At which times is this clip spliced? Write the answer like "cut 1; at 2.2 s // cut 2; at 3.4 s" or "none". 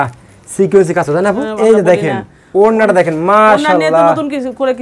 cut 1; at 1.5 s